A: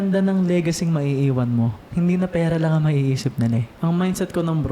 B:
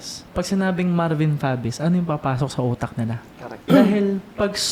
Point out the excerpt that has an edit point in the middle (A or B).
A